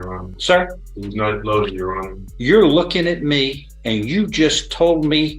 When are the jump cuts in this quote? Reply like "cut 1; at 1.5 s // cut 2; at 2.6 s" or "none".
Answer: cut 1; at 2.2 s // cut 2; at 3.7 s